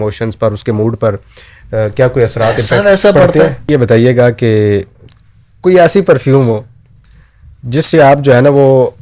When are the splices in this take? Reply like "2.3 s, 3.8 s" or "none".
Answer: 3.7 s